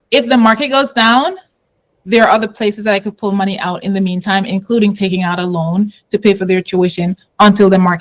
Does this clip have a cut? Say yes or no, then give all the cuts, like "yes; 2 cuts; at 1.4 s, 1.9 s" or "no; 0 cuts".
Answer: no; 0 cuts